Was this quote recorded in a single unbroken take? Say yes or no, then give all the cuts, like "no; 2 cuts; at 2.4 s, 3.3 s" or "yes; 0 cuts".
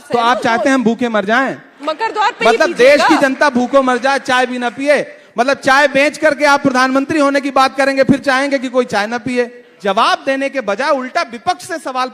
no; 2 cuts; at 1.7 s, 9.7 s